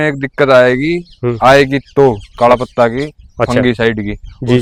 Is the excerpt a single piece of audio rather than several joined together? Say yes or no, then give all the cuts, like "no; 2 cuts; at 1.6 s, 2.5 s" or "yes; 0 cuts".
yes; 0 cuts